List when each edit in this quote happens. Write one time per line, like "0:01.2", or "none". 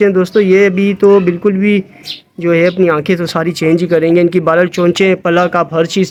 none

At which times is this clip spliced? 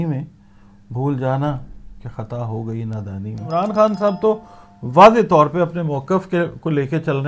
0:03.4

